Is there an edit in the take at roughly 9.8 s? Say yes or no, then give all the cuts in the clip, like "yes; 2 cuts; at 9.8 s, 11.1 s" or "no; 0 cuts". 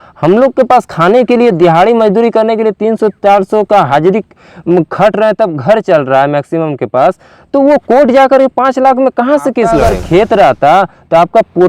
yes; 1 cut; at 9.8 s